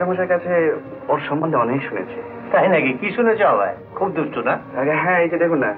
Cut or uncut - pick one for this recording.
uncut